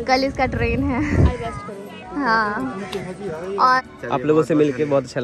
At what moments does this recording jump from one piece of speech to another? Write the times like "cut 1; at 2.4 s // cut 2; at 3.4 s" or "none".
cut 1; at 3.8 s